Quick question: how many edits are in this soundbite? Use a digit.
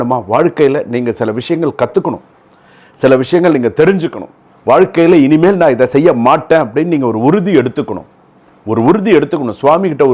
0